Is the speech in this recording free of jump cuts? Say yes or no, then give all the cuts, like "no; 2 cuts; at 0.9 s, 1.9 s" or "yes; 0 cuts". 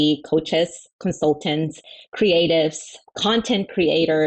no; 1 cut; at 3.1 s